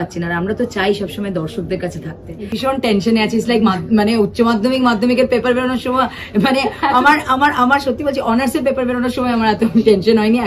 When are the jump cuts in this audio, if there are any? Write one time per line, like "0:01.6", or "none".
0:02.6